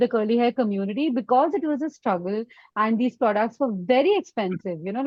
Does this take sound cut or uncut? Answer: uncut